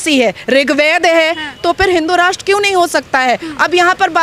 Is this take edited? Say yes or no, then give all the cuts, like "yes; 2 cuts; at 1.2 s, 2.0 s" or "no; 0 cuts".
no; 0 cuts